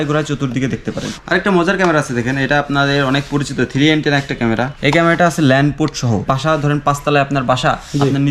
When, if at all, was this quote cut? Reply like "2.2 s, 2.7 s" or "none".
1.1 s, 4.7 s, 6.2 s